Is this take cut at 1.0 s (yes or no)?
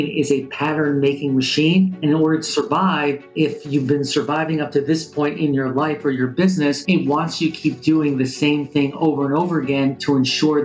no